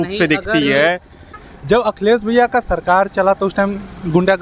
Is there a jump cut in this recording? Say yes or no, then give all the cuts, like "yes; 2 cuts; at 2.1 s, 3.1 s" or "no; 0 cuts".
yes; 1 cut; at 1.5 s